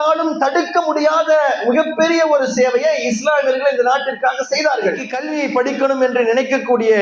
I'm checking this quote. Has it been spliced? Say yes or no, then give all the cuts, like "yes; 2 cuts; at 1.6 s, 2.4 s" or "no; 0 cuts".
yes; 1 cut; at 5.1 s